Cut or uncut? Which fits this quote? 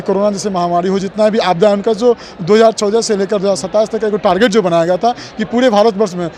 uncut